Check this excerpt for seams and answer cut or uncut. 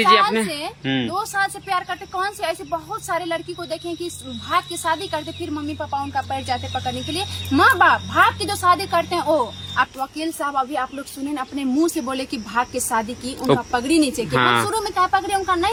uncut